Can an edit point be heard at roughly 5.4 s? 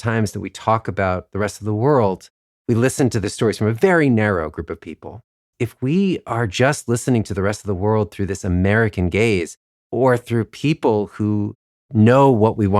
yes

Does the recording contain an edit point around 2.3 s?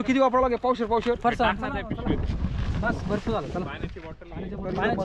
no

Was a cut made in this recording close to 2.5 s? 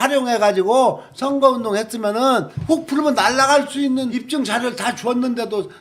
yes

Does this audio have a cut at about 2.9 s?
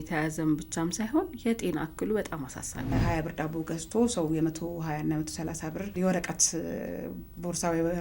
yes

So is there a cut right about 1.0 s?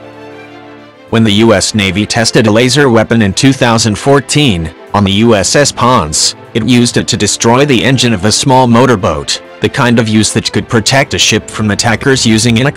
yes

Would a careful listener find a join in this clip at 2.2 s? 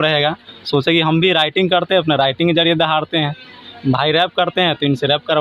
no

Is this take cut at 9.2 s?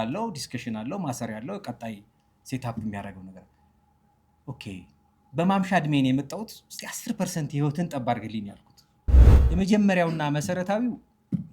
yes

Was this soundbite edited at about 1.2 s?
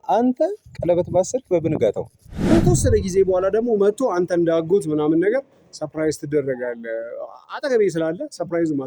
no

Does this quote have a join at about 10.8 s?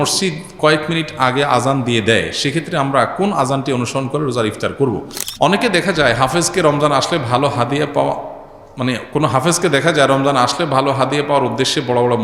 no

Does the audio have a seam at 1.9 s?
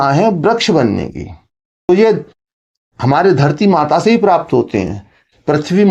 yes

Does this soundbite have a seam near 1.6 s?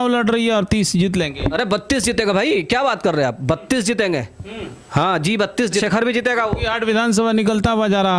no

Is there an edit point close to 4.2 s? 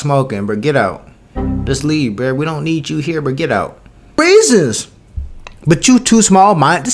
yes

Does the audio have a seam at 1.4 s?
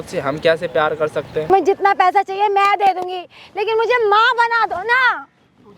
yes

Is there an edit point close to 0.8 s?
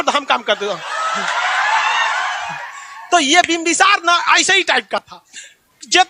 no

